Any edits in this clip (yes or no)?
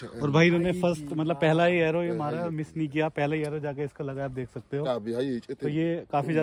no